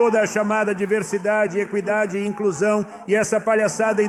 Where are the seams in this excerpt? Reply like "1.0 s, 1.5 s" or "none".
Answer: none